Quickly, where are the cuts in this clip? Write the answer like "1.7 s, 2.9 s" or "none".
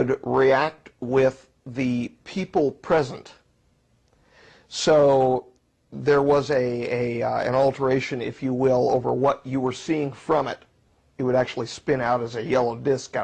none